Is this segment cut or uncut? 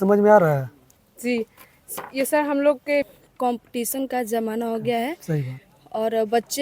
cut